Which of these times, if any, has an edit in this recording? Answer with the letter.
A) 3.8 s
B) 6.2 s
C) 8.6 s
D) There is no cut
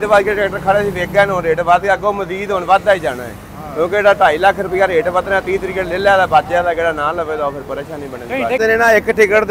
C